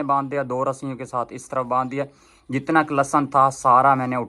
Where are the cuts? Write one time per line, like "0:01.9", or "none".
none